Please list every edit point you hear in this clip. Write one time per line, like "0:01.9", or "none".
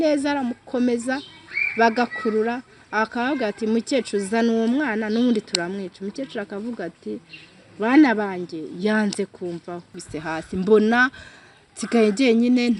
0:09.9